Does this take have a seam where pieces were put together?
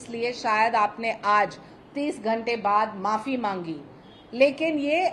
no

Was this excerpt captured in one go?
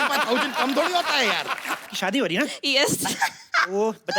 no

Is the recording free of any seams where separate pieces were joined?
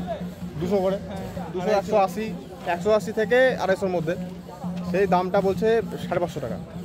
yes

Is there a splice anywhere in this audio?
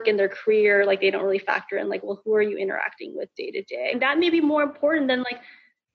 yes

